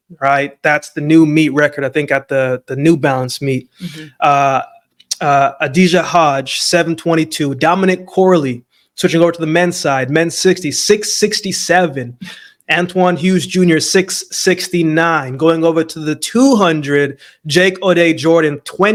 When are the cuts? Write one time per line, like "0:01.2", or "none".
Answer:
none

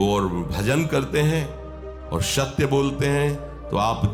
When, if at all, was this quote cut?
none

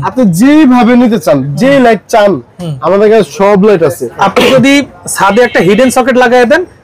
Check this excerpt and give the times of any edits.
0:04.1

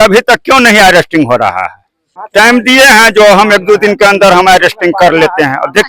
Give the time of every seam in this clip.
0:02.2

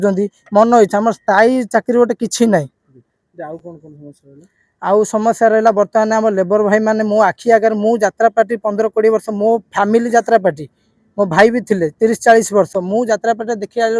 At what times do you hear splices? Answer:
none

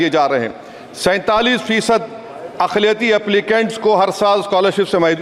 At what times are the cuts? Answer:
none

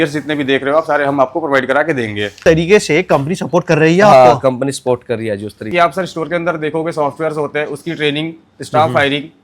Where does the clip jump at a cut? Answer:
0:02.4
0:05.7

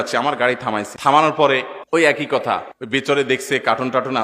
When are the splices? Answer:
0:00.9
0:01.8
0:02.7

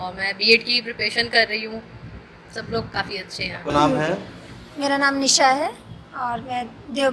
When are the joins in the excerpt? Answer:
0:03.7

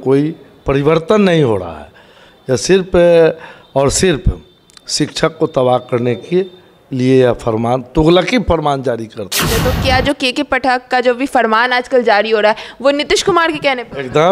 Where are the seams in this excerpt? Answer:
0:09.6

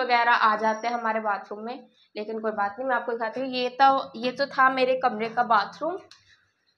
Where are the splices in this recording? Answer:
none

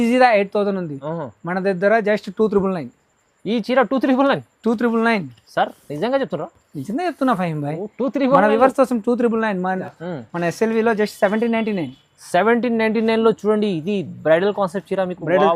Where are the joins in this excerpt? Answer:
0:09.8

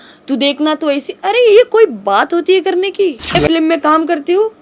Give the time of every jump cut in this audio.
0:03.4

